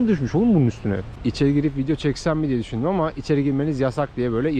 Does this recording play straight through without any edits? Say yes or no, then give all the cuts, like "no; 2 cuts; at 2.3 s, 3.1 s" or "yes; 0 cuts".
no; 1 cut; at 1.1 s